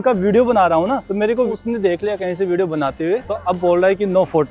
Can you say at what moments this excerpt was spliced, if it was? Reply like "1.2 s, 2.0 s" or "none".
1.4 s, 3.3 s